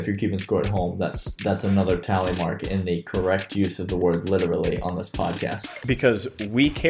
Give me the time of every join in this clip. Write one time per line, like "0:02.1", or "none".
0:05.5